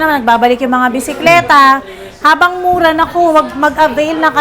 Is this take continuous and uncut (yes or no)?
yes